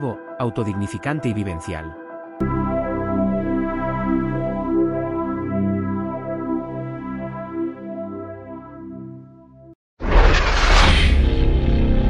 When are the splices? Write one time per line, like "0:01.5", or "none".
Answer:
0:09.6

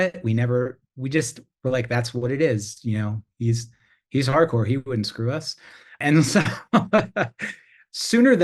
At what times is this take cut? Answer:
0:06.0

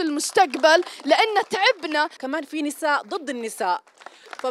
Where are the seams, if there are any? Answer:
0:02.2

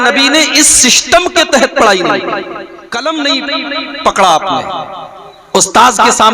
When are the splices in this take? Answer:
0:02.7

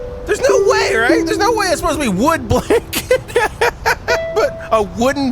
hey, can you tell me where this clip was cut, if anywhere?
0:03.2

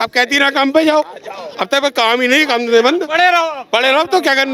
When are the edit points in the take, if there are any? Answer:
none

